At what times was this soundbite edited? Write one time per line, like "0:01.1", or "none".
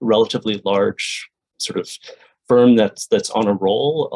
0:01.4